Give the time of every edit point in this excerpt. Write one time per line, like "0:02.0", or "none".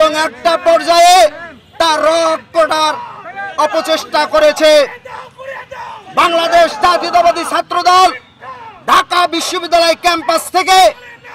none